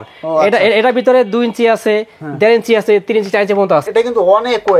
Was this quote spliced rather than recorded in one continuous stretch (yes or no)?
yes